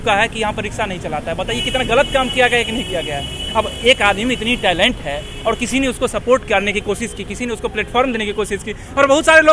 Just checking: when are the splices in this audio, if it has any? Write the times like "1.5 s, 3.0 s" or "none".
none